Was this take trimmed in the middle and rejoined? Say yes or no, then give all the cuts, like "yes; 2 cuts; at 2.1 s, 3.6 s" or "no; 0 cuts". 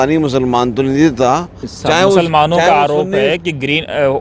yes; 1 cut; at 1.7 s